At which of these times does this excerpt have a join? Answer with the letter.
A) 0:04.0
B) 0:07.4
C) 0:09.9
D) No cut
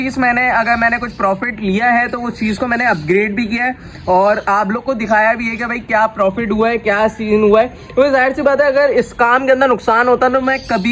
D